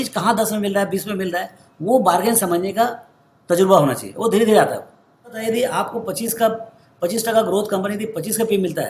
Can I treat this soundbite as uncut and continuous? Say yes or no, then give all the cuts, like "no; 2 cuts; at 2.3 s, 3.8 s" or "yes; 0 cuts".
no; 1 cut; at 5.4 s